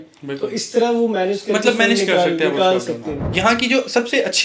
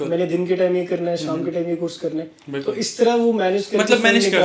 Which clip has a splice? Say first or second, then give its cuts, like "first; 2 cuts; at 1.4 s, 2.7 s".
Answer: first; 1 cut; at 3.2 s